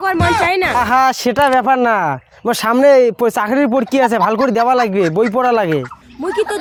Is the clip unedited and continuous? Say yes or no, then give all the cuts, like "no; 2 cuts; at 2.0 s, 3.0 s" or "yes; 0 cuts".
yes; 0 cuts